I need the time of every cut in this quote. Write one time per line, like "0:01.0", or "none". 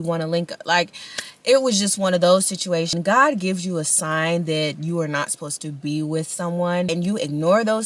0:02.9
0:06.9